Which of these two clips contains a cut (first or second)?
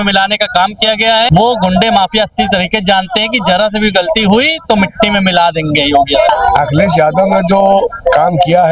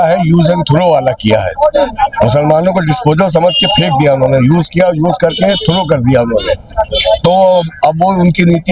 first